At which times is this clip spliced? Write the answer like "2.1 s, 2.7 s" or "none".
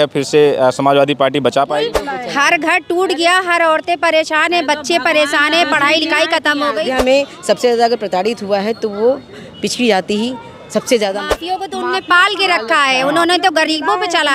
2.0 s, 6.9 s, 11.2 s